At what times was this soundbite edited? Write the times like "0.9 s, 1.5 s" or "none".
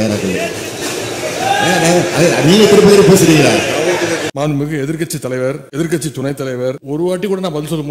4.3 s, 5.6 s, 6.8 s